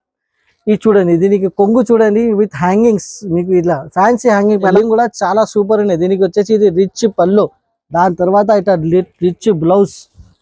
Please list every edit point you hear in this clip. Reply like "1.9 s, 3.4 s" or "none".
4.7 s